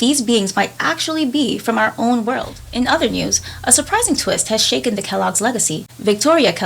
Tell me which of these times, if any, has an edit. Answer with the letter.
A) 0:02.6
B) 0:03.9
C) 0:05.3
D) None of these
A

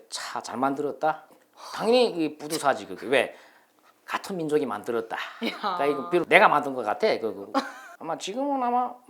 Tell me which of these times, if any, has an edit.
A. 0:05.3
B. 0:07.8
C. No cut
B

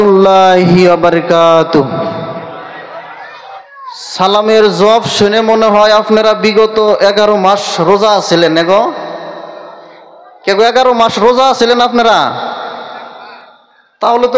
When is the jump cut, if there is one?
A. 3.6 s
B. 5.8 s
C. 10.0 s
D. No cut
A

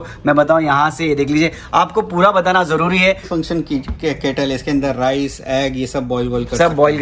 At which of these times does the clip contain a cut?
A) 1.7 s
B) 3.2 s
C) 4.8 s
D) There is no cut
B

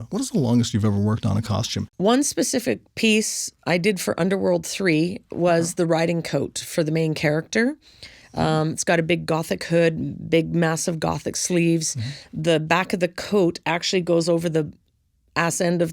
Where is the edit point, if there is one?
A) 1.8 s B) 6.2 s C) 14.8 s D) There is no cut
A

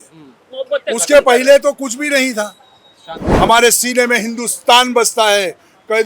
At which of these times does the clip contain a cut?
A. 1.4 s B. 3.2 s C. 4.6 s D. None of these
B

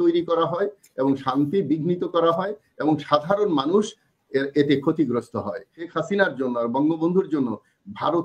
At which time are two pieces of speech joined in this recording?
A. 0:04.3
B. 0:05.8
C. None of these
B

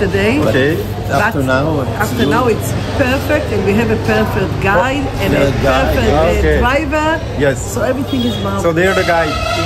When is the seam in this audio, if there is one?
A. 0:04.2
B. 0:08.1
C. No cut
C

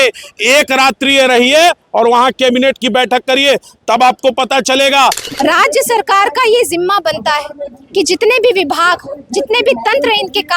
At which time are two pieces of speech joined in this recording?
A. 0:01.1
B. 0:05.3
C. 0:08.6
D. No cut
B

